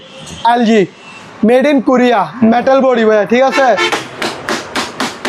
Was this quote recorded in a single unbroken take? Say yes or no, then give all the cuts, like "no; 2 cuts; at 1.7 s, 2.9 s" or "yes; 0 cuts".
no; 1 cut; at 4.0 s